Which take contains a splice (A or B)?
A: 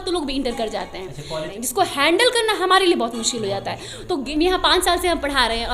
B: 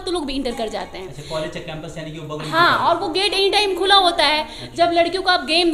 A